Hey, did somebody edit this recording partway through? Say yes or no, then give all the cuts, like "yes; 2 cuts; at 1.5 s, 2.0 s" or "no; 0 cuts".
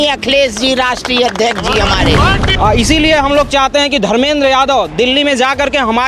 yes; 1 cut; at 2.4 s